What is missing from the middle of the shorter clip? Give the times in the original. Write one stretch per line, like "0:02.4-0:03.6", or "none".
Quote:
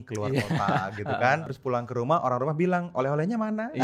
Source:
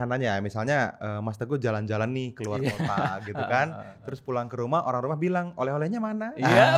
0:03.8-0:04.1